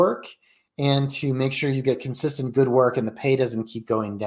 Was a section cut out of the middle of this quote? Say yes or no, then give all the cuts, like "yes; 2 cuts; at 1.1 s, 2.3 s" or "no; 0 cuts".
no; 0 cuts